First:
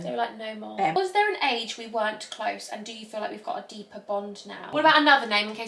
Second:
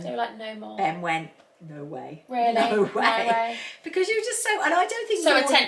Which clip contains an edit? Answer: first; 2 cuts; at 1.0 s, 4.7 s

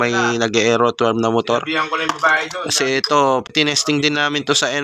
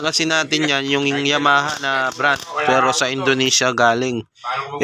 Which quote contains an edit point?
first; 1 cut; at 3.4 s

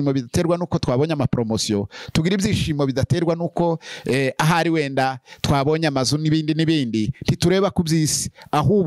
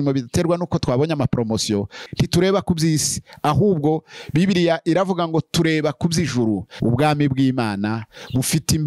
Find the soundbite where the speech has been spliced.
second; 2 cuts; at 2.1 s, 6.7 s

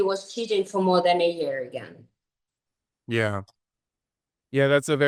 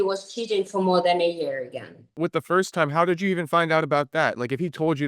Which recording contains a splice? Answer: second; 1 cut; at 2.2 s

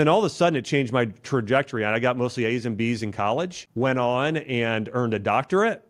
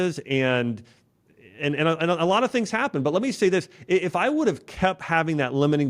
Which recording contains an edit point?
first; 1 cut; at 3.6 s

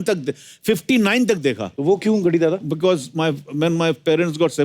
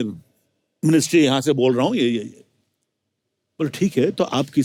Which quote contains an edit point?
first; 1 cut; at 1.7 s

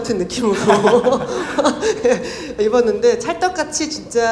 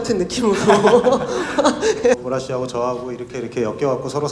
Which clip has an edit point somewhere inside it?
second; 1 cut; at 2.2 s

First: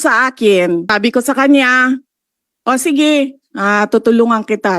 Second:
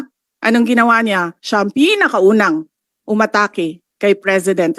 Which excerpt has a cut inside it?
first; 1 cut; at 0.9 s

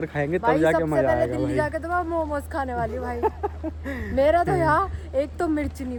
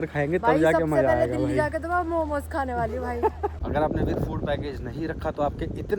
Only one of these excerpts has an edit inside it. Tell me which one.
second; 1 cut; at 3.6 s

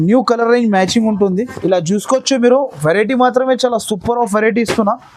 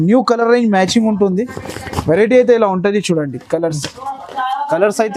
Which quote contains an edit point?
first; 1 cut; at 1.5 s

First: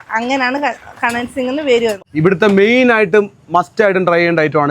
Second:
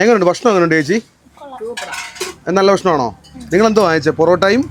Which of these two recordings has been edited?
first; 1 cut; at 2.0 s

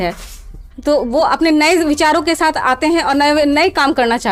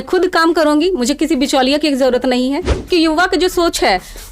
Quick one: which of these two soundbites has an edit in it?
second; 1 cut; at 2.8 s

